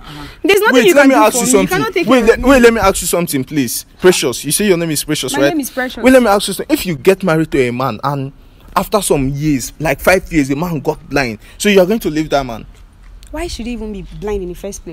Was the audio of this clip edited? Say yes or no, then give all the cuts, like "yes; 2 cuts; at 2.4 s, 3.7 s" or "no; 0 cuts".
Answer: no; 0 cuts